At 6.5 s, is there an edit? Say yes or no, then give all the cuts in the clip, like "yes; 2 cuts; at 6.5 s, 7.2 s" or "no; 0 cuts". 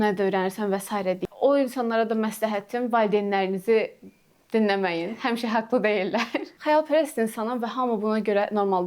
yes; 2 cuts; at 1.2 s, 6.5 s